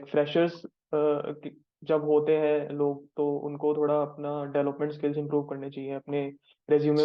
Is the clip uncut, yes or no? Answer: yes